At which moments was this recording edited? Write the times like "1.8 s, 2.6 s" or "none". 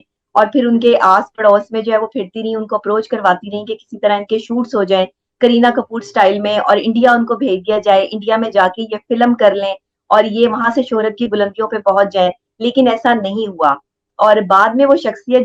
none